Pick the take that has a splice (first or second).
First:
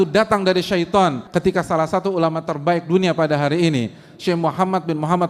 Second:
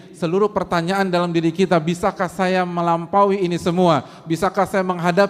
first